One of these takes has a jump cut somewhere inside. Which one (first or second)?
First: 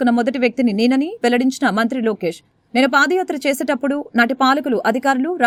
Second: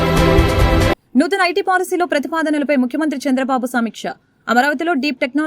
second